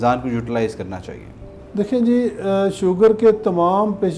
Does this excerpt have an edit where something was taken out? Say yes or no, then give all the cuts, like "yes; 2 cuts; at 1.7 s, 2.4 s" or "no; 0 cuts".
no; 0 cuts